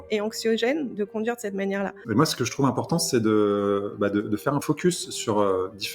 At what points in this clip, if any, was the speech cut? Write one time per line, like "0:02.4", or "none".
0:02.0
0:04.6